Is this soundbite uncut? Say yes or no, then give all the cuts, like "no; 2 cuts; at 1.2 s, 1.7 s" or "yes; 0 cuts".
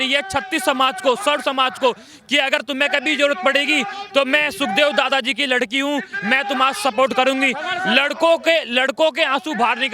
yes; 0 cuts